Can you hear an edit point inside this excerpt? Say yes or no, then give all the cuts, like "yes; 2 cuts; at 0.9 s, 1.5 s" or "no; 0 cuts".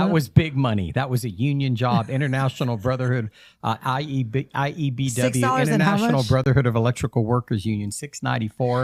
no; 0 cuts